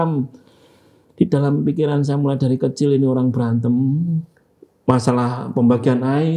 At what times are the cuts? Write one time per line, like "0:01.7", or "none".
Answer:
none